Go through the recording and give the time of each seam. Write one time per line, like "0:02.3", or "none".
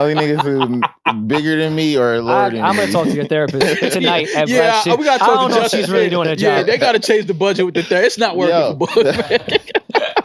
none